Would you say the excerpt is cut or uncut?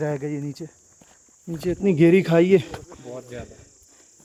uncut